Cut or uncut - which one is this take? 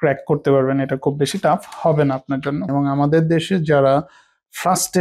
cut